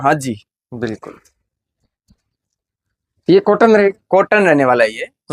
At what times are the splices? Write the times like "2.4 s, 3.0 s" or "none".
none